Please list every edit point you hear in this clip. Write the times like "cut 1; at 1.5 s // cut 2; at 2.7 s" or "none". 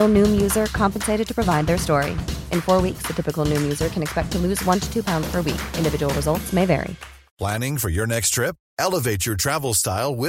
cut 1; at 7.3 s